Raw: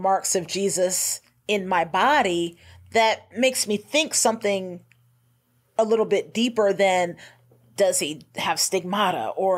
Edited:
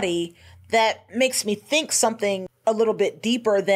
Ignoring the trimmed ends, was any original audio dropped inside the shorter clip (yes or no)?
yes